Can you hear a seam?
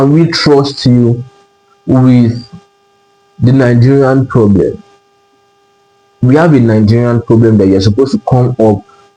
no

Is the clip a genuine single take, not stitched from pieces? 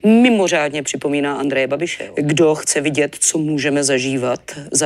no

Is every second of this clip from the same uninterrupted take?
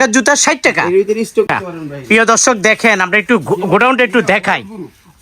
no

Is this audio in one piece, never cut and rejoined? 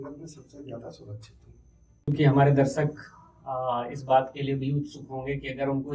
no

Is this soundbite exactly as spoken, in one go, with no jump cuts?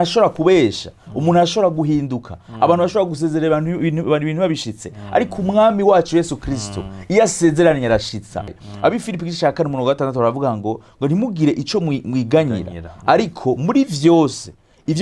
no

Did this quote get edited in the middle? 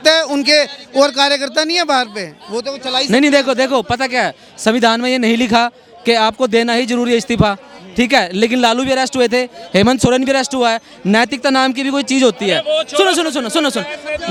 no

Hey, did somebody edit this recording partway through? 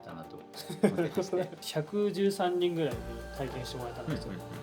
yes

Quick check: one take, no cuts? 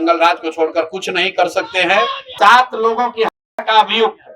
no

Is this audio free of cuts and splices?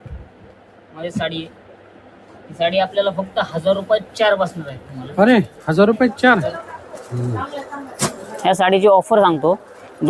no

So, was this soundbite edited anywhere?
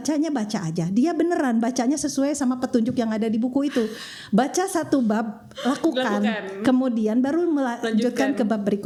no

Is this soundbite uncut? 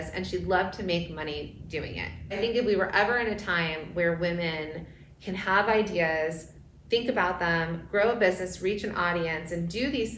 no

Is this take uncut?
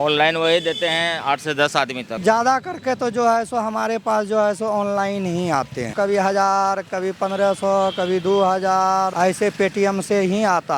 no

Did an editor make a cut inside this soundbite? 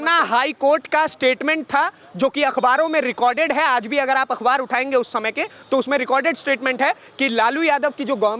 no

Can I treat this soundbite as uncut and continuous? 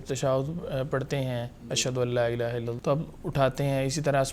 no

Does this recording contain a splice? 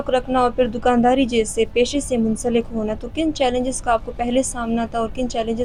no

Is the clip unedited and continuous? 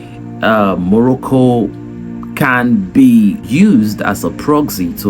no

